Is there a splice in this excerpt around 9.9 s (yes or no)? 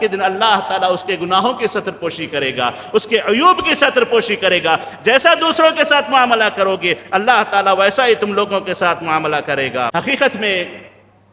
yes